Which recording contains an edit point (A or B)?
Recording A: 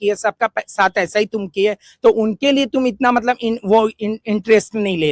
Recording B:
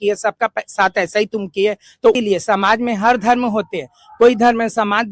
B